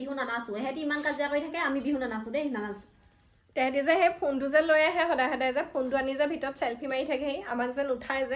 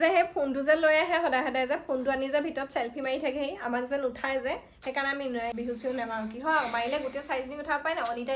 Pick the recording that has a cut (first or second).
second